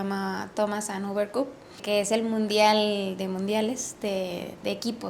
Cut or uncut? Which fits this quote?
cut